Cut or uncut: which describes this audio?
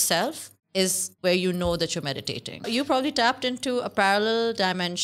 cut